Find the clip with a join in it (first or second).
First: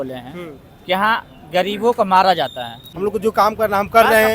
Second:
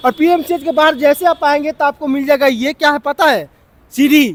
first